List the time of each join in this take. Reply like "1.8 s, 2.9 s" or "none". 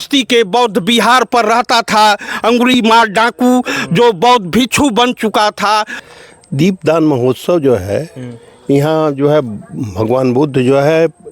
6.0 s